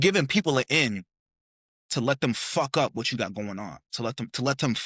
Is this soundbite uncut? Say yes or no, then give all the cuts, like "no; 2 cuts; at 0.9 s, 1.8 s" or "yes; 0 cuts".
yes; 0 cuts